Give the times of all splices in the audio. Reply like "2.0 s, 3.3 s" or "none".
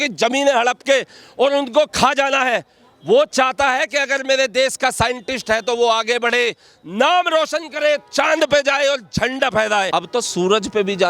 9.9 s